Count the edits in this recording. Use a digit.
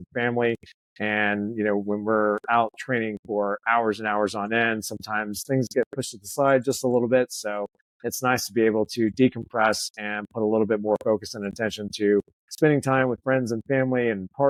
0